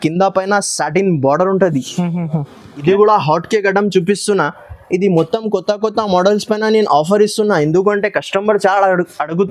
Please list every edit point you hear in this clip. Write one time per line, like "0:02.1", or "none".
0:02.6